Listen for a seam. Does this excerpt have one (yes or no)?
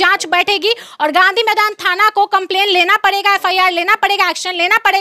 no